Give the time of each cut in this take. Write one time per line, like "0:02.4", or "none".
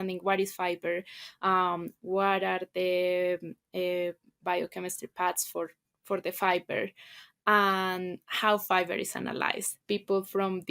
0:09.7